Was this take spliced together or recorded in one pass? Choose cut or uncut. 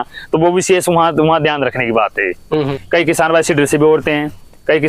cut